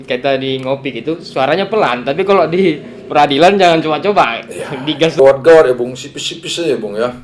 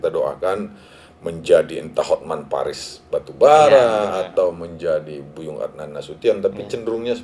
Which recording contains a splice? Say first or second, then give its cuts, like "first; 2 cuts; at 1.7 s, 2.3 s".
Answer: first; 1 cut; at 5.2 s